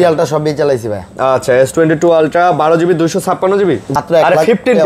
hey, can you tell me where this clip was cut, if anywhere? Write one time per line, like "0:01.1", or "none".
0:03.9